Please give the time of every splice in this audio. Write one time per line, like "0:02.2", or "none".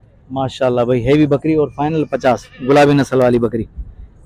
none